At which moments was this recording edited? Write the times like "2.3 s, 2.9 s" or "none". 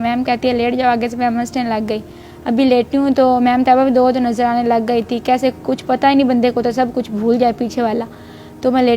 none